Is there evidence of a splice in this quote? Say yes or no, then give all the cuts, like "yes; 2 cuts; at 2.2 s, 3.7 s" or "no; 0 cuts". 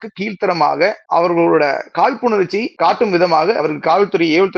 yes; 3 cuts; at 1.0 s, 2.7 s, 3.6 s